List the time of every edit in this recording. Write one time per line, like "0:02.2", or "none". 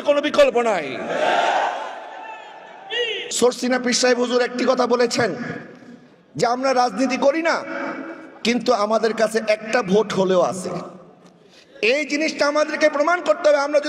0:03.2